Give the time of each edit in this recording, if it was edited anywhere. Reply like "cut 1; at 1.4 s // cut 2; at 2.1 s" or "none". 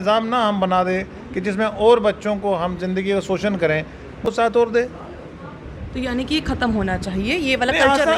cut 1; at 4.2 s